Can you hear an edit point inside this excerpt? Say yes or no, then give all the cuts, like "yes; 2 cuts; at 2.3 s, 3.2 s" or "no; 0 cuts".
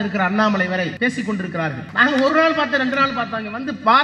yes; 2 cuts; at 0.9 s, 1.9 s